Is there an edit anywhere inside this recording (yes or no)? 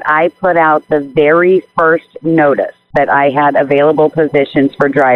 yes